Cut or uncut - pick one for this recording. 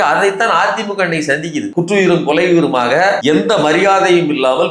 cut